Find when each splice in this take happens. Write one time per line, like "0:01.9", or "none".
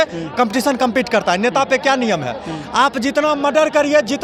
none